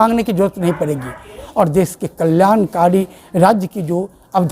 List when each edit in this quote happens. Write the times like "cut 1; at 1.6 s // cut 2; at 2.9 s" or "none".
cut 1; at 1.4 s